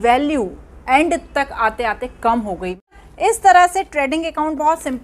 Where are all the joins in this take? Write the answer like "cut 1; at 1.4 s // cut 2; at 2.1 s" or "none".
cut 1; at 3.0 s